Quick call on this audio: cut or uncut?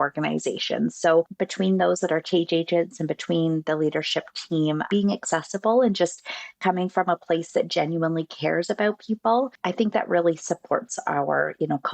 cut